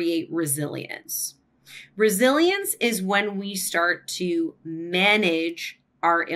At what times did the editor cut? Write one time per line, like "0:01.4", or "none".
none